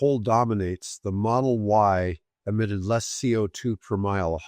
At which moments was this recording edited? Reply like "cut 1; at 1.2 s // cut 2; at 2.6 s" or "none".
none